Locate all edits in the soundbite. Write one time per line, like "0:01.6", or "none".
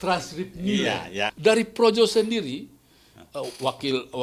0:01.3